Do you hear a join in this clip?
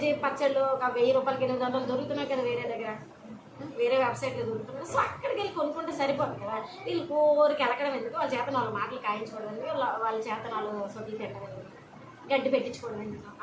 no; 0 cuts

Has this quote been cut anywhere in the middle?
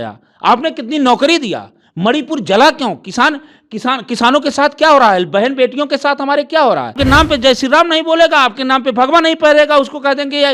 yes; 1 cut; at 7.0 s

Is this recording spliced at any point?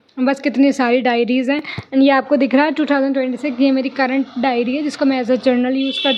no; 0 cuts

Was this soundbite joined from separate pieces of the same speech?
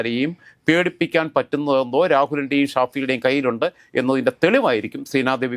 no; 0 cuts

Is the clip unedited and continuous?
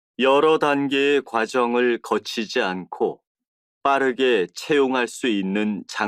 yes; 0 cuts

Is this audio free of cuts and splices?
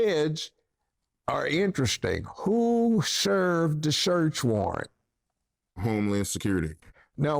yes; 0 cuts

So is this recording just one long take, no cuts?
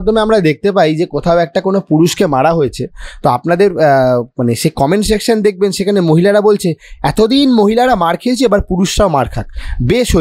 yes; 0 cuts

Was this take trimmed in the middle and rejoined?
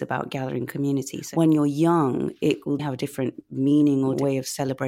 yes; 3 cuts; at 1.2 s, 2.8 s, 4.2 s

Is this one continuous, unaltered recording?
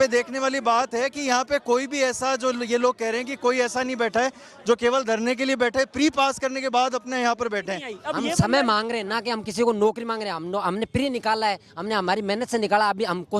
no; 1 cut; at 8.0 s

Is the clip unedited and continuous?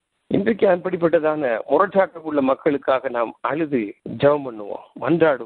yes; 0 cuts

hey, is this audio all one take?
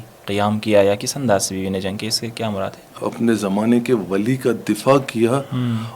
no; 1 cut; at 3.0 s

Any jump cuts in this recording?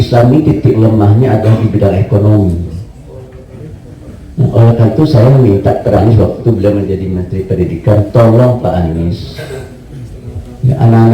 yes; 1 cut; at 6.0 s

